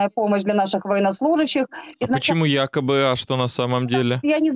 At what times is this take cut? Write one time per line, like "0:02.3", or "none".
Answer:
none